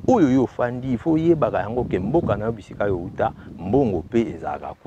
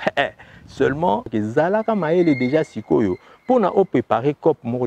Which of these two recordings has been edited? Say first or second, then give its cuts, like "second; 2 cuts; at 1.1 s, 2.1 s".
second; 1 cut; at 1.3 s